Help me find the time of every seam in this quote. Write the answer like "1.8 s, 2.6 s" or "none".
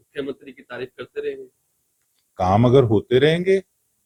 none